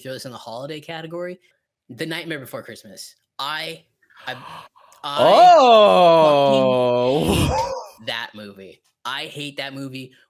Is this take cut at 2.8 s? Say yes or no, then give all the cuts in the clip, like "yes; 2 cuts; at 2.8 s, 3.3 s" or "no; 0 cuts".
no; 1 cut; at 1.5 s